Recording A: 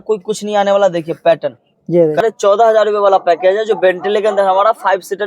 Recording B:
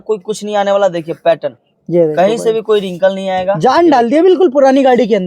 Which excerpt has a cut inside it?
A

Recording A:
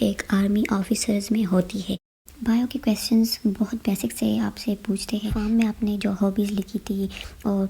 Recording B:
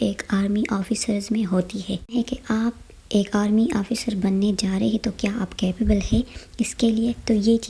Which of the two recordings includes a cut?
A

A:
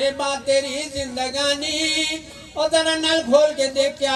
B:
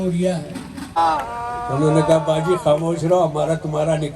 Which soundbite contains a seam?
B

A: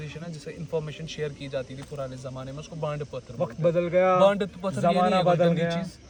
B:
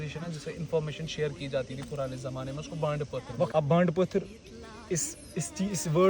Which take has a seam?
B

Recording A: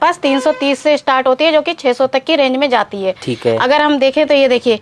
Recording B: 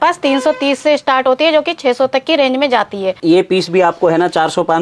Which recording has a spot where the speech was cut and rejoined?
B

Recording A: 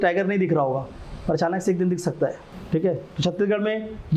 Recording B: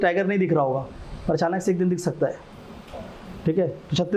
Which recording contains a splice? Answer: A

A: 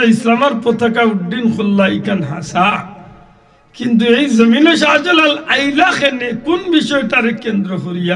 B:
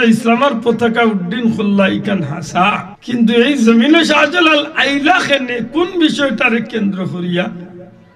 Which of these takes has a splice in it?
B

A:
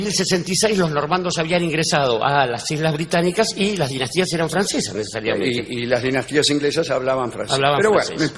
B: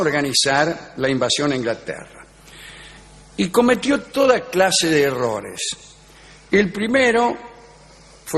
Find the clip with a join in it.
B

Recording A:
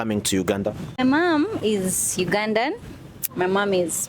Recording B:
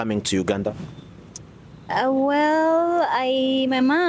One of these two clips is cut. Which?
A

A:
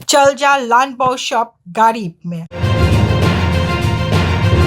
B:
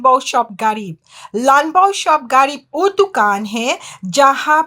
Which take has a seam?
A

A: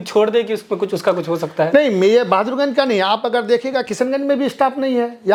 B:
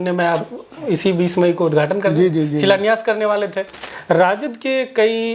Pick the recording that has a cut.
B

